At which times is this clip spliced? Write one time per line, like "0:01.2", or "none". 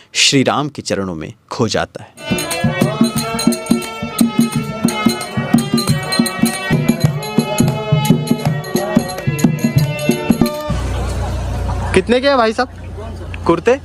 0:02.2
0:10.7